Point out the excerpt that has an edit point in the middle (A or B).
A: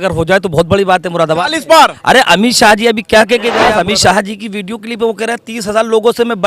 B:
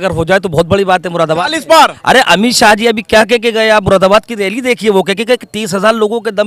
A